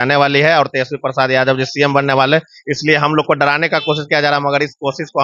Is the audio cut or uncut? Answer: uncut